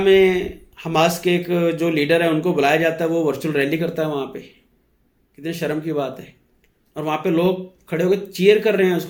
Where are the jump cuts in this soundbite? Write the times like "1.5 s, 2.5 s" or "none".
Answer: none